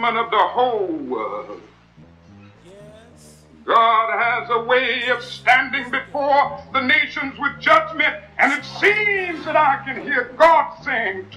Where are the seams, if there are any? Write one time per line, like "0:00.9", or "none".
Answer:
none